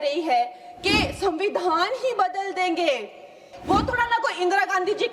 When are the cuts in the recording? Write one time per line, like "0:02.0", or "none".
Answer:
0:03.6